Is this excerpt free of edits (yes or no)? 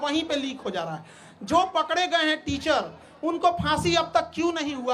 yes